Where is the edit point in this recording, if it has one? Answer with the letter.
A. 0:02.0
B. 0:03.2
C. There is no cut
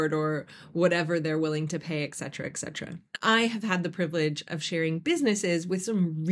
B